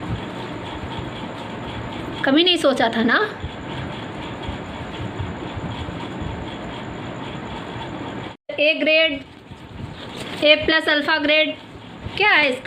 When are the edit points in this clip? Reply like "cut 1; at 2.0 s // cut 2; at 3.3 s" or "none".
cut 1; at 8.4 s